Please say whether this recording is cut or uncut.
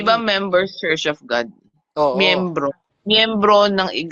cut